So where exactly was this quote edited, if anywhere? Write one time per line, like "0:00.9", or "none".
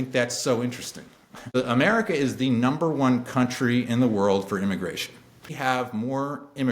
0:01.6
0:05.5